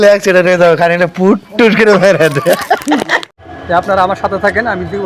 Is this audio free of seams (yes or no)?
no